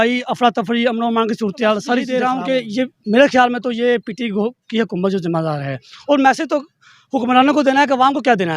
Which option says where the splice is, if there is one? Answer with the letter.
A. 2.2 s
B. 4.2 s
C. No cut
A